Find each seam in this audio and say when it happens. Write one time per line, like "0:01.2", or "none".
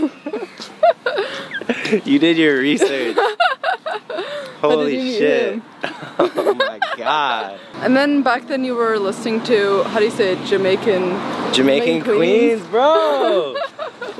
0:07.6